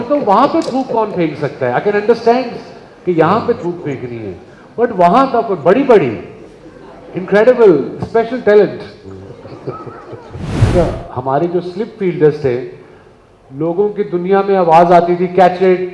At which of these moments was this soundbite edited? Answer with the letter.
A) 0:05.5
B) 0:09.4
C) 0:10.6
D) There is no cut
C